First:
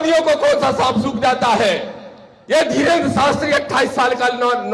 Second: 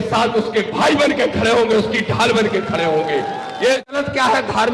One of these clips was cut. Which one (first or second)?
second